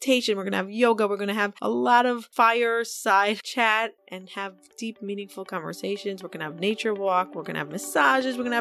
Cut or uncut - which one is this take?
cut